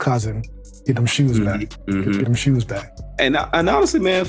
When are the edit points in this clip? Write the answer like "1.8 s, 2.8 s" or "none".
none